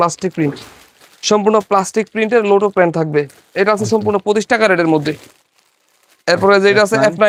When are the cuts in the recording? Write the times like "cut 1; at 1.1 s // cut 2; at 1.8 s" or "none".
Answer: none

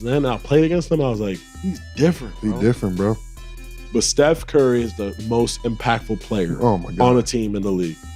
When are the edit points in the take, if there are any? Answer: none

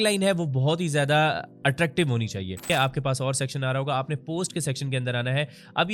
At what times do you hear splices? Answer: cut 1; at 2.6 s

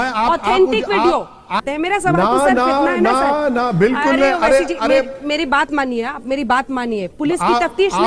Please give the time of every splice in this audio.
cut 1; at 1.6 s

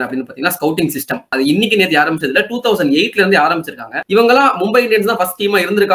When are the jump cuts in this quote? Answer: cut 1; at 1.2 s // cut 2; at 3.9 s

